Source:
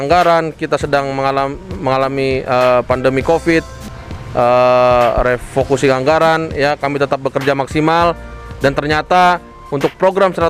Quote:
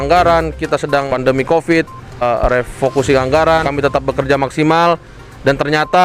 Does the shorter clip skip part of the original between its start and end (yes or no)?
yes